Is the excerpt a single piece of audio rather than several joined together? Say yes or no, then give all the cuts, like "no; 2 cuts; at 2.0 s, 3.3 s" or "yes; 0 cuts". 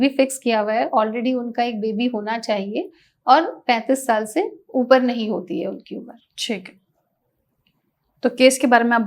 yes; 0 cuts